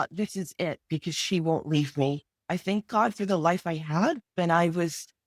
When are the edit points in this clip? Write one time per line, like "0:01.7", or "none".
0:02.3
0:04.3